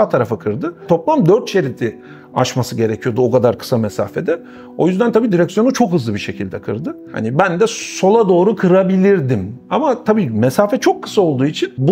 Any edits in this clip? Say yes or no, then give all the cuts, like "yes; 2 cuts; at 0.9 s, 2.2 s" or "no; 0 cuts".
no; 0 cuts